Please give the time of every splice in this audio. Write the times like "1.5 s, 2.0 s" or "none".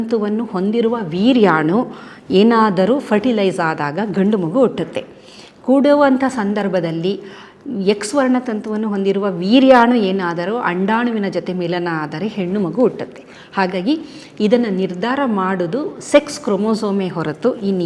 none